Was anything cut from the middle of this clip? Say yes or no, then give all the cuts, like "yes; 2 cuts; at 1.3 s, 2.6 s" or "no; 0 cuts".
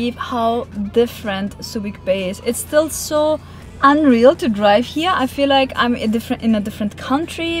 no; 0 cuts